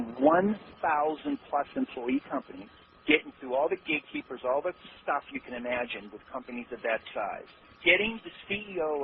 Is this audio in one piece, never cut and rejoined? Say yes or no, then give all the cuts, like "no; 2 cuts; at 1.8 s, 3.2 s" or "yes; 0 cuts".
yes; 0 cuts